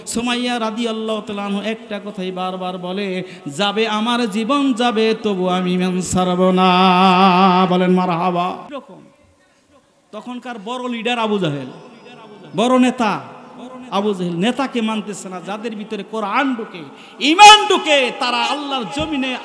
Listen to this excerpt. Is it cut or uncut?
uncut